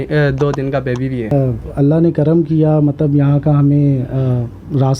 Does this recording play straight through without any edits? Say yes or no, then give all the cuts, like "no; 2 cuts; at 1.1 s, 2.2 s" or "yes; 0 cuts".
no; 1 cut; at 1.3 s